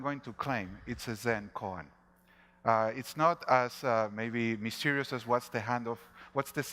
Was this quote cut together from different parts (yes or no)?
yes